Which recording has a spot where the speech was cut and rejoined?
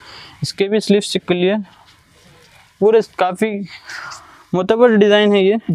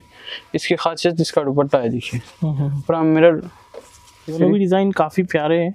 second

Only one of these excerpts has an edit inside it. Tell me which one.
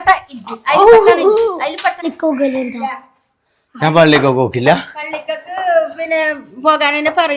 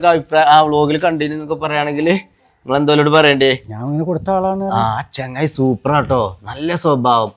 first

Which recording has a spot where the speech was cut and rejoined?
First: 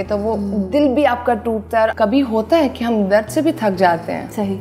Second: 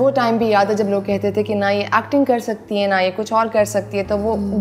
first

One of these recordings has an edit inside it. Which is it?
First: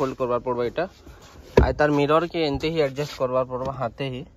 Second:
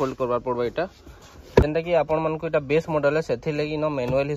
second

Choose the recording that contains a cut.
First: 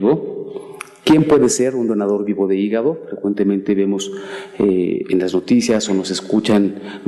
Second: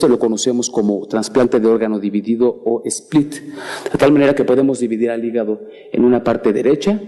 first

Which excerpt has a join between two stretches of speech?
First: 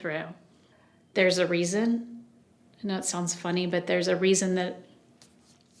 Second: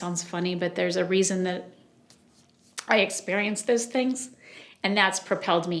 first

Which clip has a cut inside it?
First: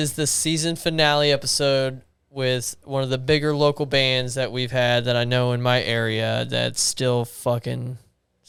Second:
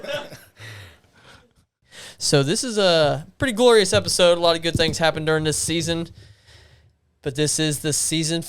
second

